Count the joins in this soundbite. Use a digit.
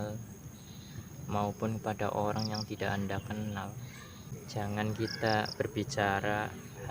1